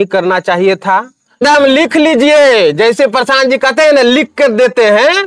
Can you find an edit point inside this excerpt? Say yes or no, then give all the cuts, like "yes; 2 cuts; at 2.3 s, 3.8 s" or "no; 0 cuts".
yes; 1 cut; at 1.4 s